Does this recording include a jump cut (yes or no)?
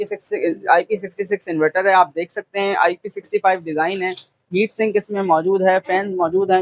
no